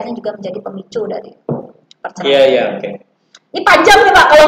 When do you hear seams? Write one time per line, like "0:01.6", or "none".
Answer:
none